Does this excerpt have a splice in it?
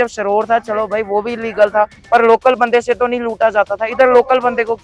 no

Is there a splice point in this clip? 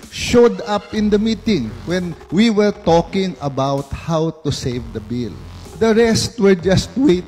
no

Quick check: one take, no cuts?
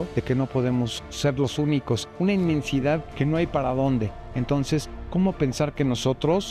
yes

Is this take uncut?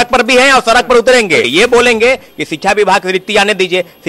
no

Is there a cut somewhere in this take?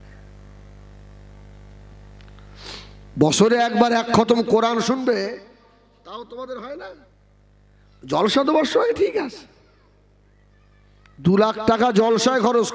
no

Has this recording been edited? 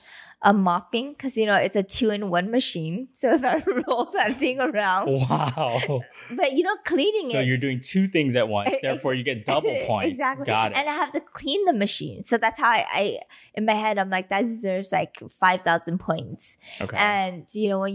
no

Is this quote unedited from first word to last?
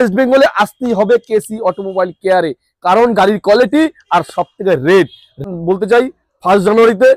no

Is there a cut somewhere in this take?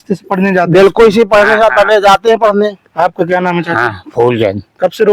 no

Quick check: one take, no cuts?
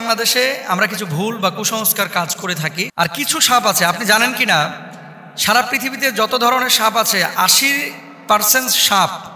no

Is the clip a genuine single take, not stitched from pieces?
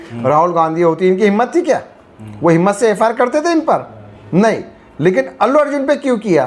yes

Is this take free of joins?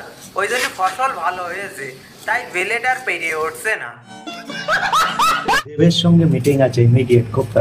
no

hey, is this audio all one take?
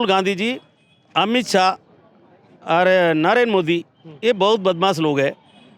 yes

